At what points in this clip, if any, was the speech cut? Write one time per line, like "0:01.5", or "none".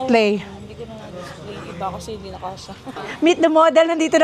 0:03.0